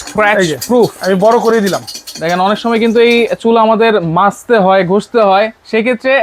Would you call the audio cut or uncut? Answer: uncut